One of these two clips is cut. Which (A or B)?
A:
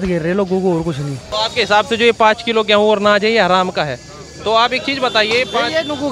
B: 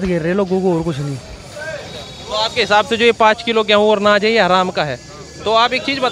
A